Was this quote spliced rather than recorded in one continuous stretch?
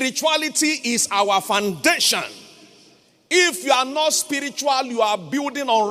no; 0 cuts

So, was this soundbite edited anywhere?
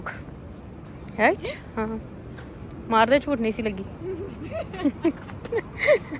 no; 0 cuts

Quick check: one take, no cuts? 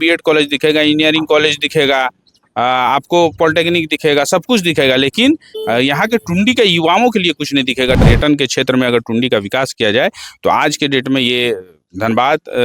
no; 1 cut; at 8.0 s

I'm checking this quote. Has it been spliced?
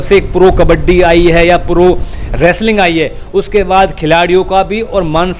no; 0 cuts

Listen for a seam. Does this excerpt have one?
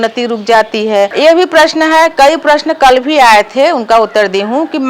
yes; 1 cut; at 1.1 s

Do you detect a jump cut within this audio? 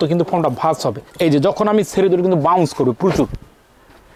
no; 0 cuts

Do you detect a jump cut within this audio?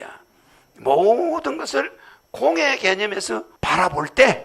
yes; 1 cut; at 3.5 s

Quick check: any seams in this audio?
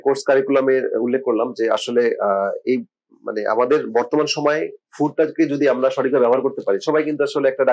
no; 0 cuts

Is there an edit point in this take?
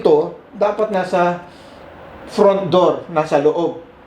no; 0 cuts

